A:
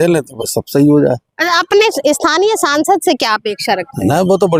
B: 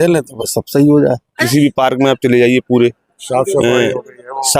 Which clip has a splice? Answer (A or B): B